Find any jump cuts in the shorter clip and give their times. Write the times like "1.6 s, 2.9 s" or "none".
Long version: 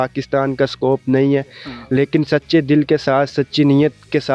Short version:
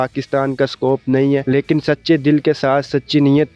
1.4 s